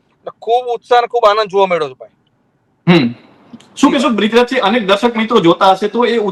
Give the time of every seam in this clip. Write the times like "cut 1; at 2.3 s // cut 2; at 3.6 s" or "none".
none